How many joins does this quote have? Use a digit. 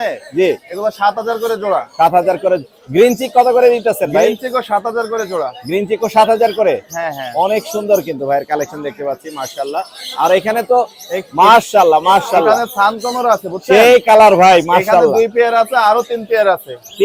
0